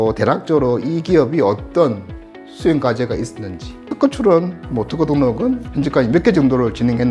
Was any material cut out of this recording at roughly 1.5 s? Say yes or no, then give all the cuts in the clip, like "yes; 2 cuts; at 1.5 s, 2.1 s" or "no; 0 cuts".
no; 2 cuts; at 3.9 s, 5.7 s